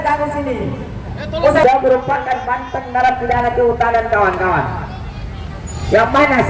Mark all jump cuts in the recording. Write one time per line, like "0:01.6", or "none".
0:01.6